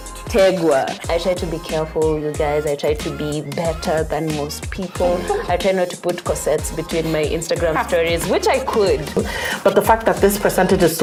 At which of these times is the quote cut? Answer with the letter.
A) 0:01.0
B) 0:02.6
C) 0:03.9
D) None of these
D